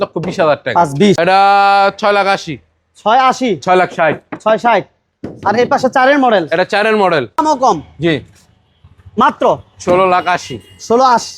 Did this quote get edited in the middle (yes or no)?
yes